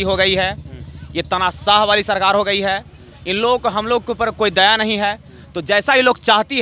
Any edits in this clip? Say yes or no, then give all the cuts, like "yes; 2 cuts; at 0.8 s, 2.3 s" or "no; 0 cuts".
no; 0 cuts